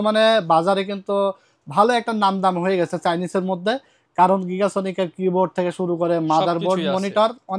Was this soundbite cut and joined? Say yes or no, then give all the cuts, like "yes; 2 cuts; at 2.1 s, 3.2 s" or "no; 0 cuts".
no; 0 cuts